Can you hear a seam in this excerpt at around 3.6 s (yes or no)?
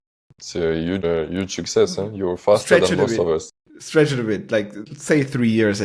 no